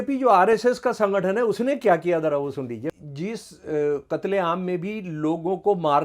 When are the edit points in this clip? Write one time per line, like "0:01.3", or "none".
0:02.9

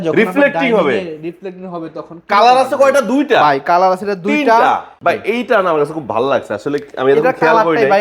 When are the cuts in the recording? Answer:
0:04.9

